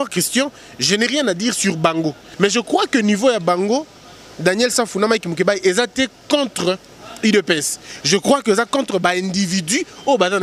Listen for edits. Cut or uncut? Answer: cut